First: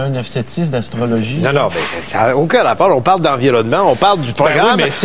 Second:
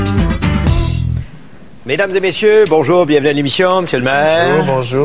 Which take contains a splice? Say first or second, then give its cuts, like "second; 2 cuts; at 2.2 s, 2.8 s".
first; 1 cut; at 4.0 s